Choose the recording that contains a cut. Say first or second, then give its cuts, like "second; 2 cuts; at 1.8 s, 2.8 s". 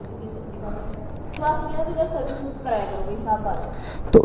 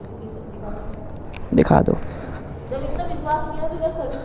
first; 1 cut; at 1.3 s